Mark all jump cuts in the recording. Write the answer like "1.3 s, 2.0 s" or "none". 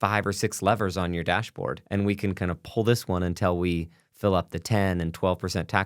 1.8 s